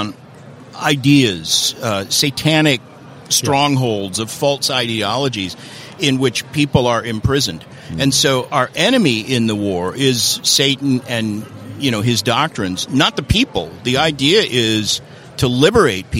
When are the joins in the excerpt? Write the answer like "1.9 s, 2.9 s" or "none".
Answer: none